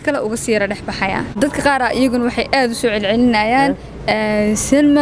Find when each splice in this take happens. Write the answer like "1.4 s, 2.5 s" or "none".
1.4 s